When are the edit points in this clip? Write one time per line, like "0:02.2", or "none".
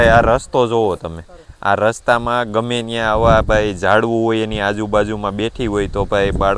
none